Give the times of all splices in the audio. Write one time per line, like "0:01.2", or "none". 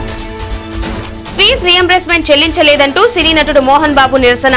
0:00.9